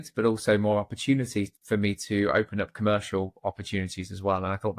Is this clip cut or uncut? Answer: uncut